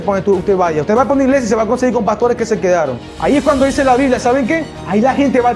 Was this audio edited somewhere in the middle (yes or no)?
yes